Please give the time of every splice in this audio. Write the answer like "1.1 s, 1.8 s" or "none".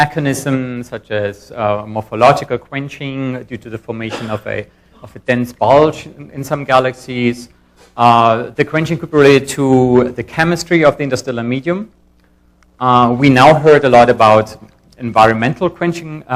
5.6 s